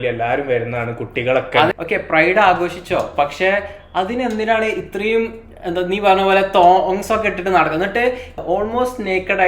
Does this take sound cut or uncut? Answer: cut